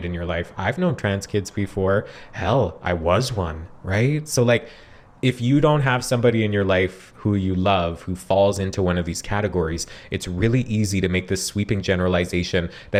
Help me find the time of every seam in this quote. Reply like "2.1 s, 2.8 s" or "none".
none

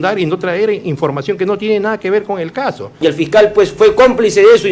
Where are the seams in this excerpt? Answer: 3.0 s

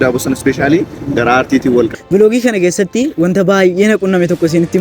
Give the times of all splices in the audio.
1.9 s

